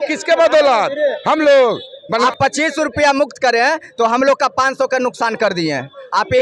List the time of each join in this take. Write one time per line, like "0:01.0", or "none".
0:02.2